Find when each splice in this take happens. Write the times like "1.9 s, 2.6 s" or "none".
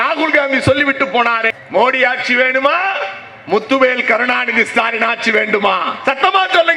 1.6 s